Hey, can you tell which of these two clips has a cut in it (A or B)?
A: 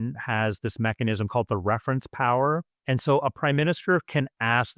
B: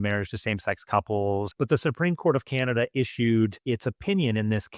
B